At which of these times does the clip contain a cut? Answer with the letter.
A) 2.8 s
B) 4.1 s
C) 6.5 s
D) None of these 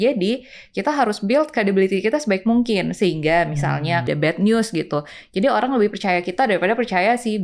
B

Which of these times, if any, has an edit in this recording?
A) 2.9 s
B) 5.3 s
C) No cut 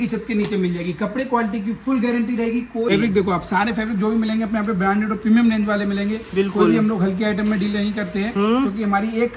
A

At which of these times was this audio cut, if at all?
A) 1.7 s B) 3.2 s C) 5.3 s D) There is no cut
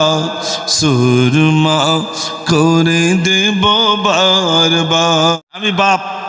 C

